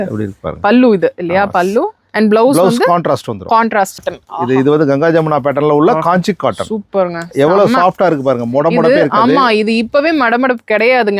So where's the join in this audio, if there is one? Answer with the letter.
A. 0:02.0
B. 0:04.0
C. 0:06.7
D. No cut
B